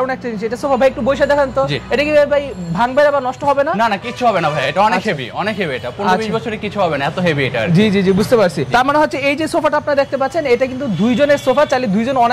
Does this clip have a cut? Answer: no; 0 cuts

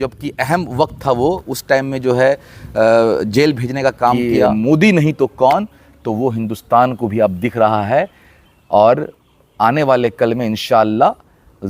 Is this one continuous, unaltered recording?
no; 1 cut; at 4.3 s

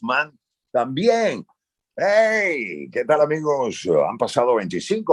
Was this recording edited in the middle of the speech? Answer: no; 0 cuts

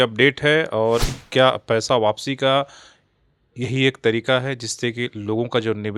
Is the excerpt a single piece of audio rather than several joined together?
yes; 0 cuts

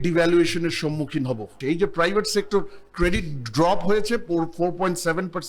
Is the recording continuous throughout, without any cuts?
no; 1 cut; at 1.5 s

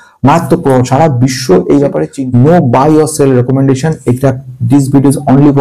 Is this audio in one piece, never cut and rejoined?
no; 1 cut; at 2.1 s

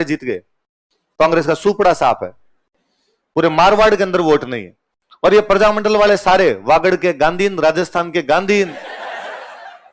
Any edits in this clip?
no; 0 cuts

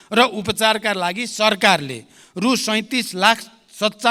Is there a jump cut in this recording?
no; 0 cuts

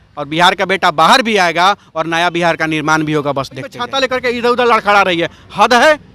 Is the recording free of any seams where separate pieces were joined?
no; 1 cut; at 3.8 s

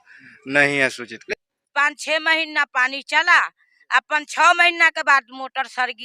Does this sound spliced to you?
yes; 1 cut; at 1.2 s

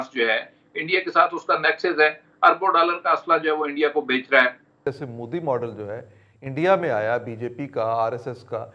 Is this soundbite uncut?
no; 1 cut; at 4.9 s

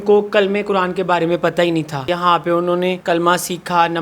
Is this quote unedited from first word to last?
no; 2 cuts; at 2.1 s, 3.0 s

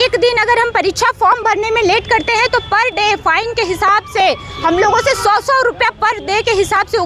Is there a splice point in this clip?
no; 0 cuts

